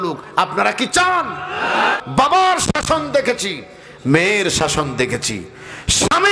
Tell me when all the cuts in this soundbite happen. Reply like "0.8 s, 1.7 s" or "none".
2.0 s